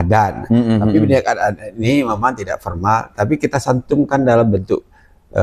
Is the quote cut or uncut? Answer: uncut